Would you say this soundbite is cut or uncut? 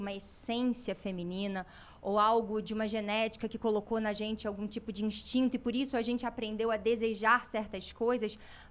uncut